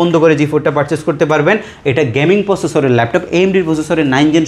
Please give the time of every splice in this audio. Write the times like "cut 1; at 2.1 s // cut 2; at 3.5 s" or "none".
none